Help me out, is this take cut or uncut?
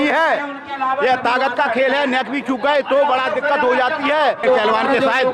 cut